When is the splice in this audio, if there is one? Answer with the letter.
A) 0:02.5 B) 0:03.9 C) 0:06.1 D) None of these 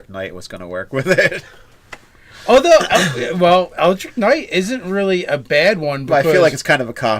B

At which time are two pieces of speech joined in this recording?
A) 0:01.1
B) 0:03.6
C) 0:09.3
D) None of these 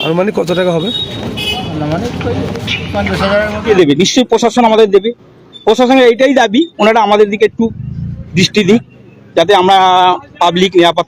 B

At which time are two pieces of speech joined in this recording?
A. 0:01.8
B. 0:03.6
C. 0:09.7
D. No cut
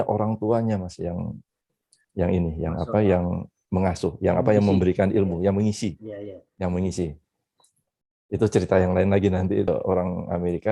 C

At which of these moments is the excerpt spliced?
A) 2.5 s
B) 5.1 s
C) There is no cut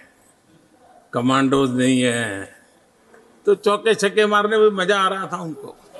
C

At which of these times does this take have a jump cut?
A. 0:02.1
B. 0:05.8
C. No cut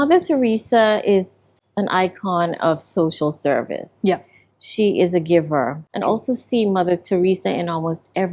B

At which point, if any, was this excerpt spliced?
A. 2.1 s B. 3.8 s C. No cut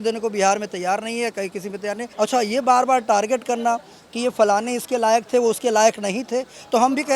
A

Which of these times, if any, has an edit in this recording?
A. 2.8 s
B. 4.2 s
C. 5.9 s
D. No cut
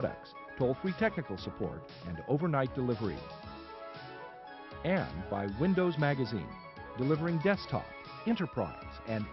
D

